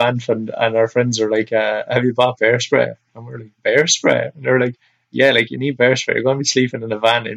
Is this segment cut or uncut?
uncut